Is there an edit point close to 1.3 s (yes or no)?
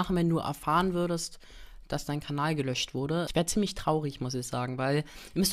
no